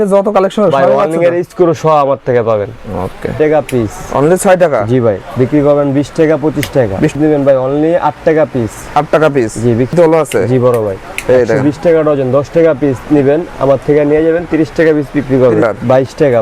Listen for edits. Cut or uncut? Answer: cut